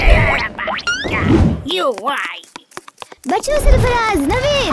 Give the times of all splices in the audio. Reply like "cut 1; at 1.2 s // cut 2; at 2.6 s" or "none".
none